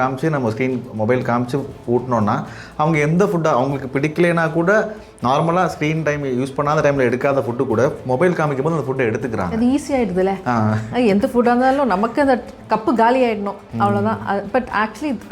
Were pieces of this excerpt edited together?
yes; 1 cut; at 12.6 s

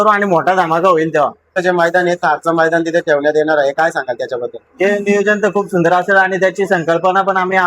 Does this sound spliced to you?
yes; 1 cut; at 1.5 s

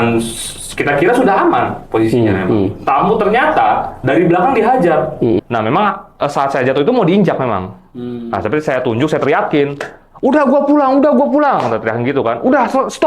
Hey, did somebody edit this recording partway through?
yes; 1 cut; at 5.4 s

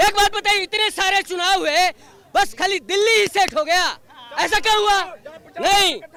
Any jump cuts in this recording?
no; 0 cuts

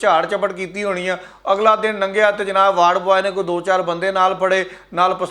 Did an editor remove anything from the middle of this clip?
no; 0 cuts

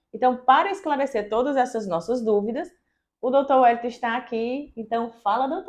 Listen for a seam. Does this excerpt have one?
no; 0 cuts

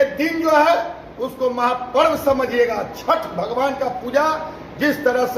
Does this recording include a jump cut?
no; 0 cuts

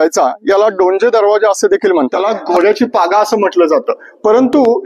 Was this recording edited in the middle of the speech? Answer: yes; 1 cut; at 2.2 s

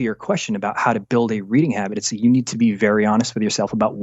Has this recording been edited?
no; 0 cuts

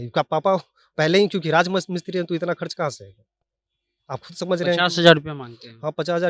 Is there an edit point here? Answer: no; 0 cuts

